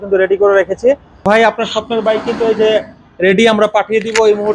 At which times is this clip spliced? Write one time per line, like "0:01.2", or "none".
0:01.1